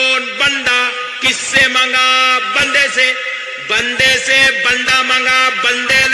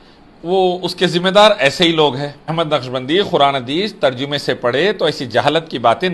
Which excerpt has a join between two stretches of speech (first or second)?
second